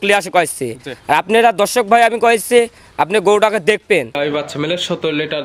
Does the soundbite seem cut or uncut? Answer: cut